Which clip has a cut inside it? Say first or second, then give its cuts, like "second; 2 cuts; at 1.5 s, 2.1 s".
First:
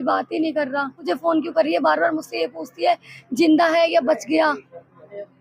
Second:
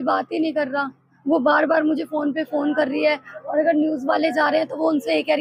first; 1 cut; at 1.1 s